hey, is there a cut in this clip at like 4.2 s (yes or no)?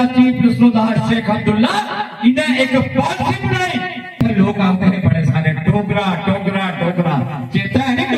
yes